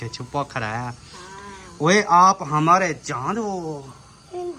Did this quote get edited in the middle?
no; 0 cuts

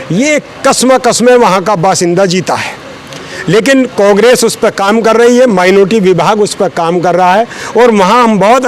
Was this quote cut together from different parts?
no; 0 cuts

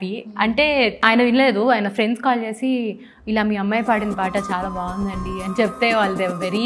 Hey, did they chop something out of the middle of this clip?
yes; 1 cut; at 1.0 s

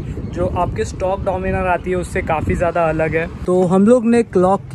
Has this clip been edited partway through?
yes; 1 cut; at 3.3 s

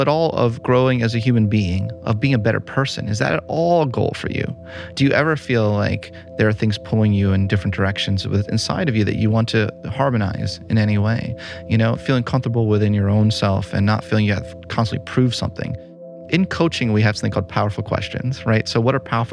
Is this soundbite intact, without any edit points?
no; 3 cuts; at 4.9 s, 11.9 s, 16.1 s

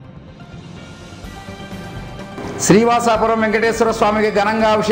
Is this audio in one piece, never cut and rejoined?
no; 1 cut; at 1.1 s

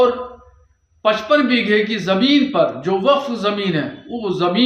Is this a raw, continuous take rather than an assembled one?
yes; 0 cuts

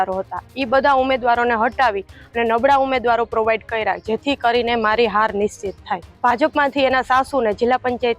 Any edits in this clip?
yes; 1 cut; at 6.1 s

